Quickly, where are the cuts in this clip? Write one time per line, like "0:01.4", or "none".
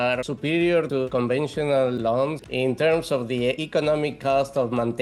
0:01.1
0:02.4
0:03.6